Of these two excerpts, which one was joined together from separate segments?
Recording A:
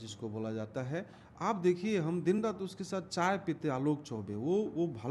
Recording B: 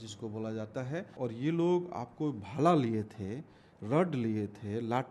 B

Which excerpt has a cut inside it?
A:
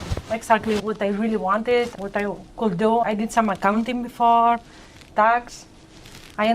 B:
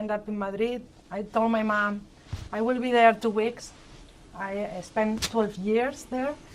A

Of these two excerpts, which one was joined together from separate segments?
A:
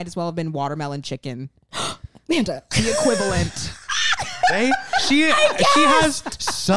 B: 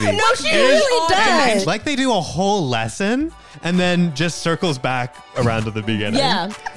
B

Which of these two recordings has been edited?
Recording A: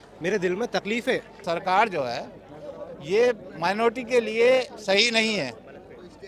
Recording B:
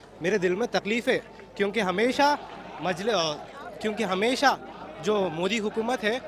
A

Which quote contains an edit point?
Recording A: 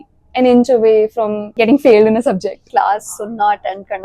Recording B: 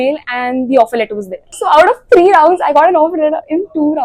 A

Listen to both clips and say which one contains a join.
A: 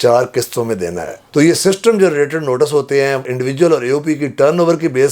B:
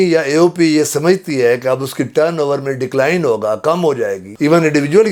A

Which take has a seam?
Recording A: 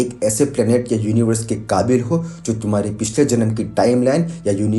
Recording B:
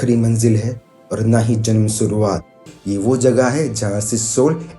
B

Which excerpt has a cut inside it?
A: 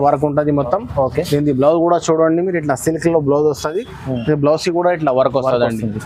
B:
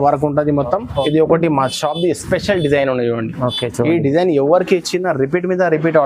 B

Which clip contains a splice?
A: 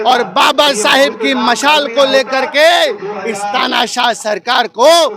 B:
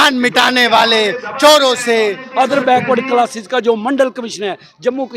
B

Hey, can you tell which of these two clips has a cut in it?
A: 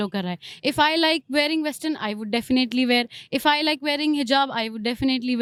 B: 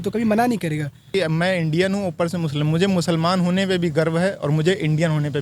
B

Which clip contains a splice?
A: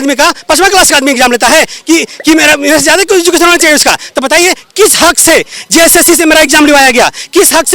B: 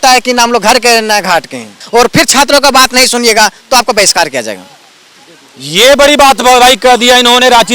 B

